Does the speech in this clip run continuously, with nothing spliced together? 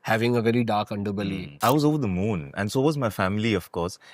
no; 1 cut; at 1.5 s

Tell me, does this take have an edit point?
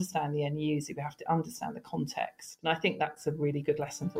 yes; 1 cut; at 2.5 s

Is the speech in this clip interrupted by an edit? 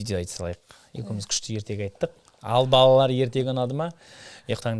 no; 0 cuts

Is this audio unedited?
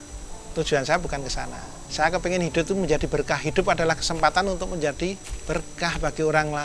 no; 1 cut; at 5.3 s

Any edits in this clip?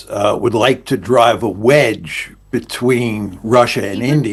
no; 0 cuts

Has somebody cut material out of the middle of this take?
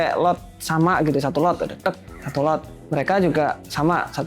yes; 1 cut; at 2.7 s

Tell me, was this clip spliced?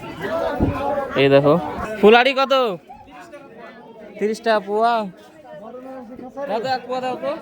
yes; 1 cut; at 1.8 s

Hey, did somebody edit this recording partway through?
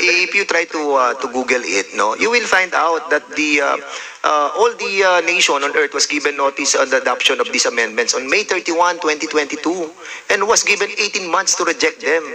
no; 0 cuts

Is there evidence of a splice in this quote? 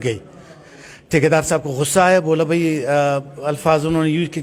no; 0 cuts

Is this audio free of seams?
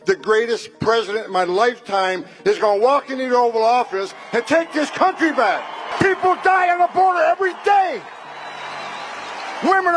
no; 1 cut; at 5.9 s

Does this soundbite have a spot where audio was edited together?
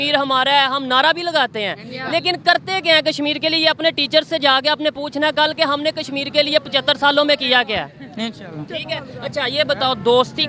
no; 0 cuts

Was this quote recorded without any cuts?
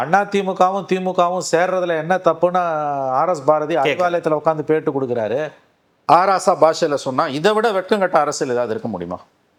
yes; 0 cuts

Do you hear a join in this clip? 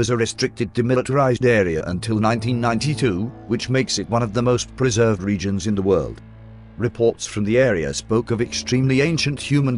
yes; 1 cut; at 6.0 s

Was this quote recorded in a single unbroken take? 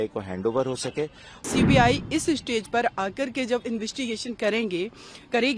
no; 1 cut; at 1.4 s

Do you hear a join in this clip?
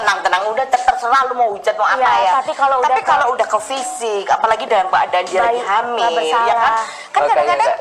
no; 0 cuts

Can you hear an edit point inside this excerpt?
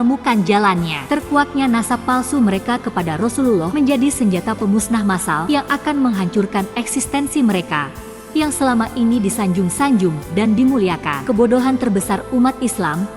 yes; 4 cuts; at 1.0 s, 3.7 s, 5.4 s, 11.1 s

